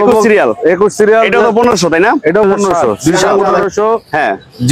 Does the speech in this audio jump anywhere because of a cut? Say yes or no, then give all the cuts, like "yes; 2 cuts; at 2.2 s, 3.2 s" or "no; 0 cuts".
yes; 1 cut; at 3.6 s